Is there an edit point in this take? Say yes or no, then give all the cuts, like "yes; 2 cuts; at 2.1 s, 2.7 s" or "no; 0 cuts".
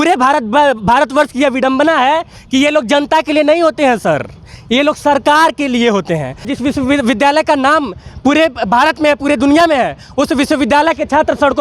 yes; 1 cut; at 6.5 s